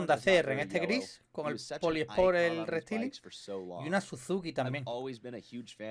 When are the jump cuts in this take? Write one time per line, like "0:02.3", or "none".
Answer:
none

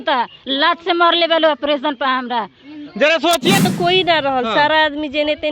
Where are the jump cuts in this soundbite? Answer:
0:03.6

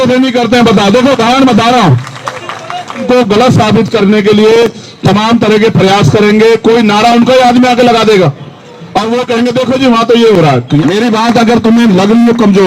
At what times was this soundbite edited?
0:03.1
0:10.8

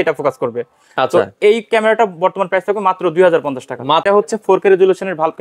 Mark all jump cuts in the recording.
0:04.0

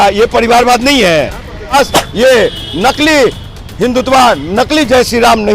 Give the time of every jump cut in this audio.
0:01.7

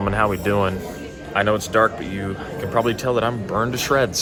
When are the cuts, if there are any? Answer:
none

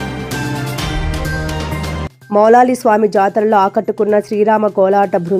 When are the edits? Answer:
0:02.2

